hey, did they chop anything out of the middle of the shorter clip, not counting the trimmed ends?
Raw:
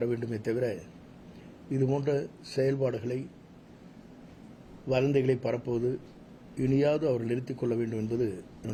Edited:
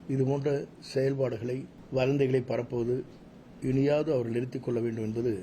yes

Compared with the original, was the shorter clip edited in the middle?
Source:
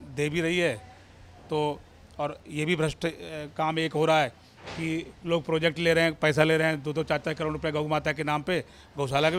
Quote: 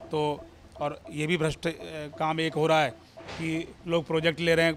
no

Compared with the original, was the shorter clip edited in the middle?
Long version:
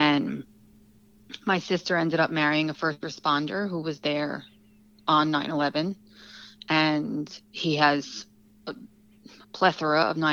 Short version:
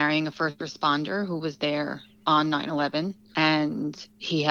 yes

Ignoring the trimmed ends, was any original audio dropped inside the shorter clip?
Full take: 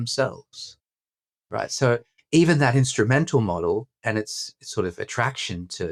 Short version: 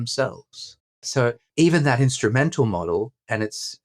yes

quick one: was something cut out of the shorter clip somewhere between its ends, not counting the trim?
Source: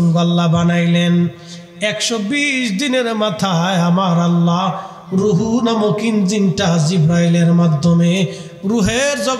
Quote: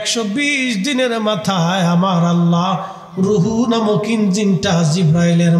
no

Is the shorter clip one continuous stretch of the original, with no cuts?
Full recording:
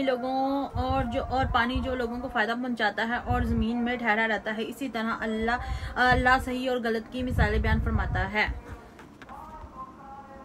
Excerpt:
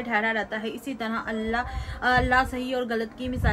yes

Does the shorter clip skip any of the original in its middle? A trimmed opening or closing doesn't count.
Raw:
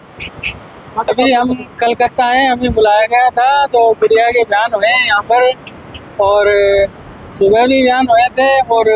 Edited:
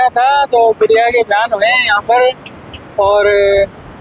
no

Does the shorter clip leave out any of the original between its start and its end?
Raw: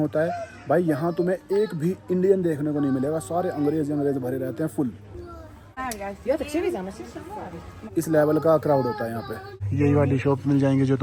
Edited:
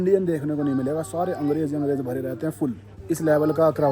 yes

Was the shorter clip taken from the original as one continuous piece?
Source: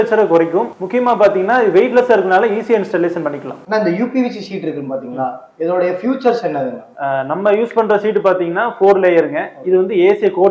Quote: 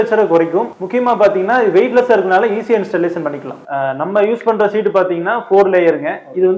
no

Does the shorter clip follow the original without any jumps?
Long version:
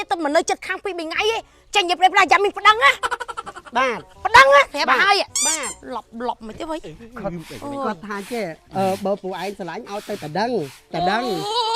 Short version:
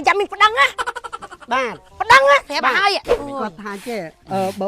no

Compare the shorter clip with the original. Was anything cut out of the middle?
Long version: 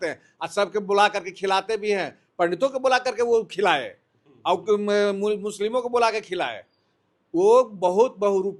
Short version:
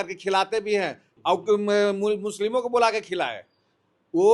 yes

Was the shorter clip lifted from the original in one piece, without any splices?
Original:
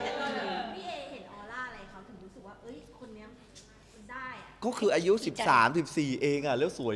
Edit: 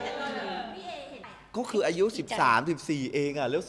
no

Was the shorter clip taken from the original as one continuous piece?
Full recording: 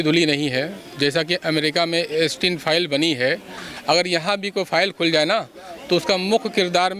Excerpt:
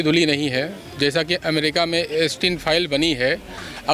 yes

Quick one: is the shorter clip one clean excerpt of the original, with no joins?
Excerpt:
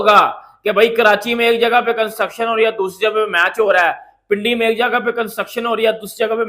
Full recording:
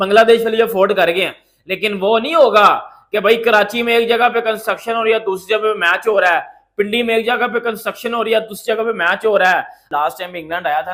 yes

